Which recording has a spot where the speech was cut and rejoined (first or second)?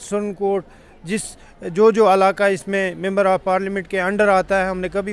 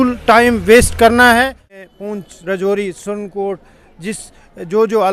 second